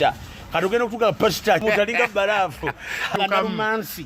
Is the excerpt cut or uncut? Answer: cut